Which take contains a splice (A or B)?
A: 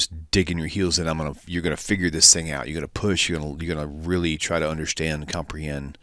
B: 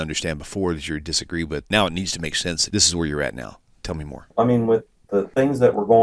B